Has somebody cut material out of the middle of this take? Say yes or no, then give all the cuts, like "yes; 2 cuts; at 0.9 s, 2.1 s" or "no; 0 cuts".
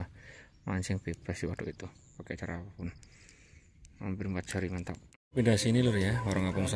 yes; 1 cut; at 5.3 s